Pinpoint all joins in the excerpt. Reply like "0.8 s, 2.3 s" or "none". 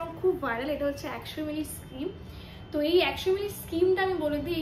none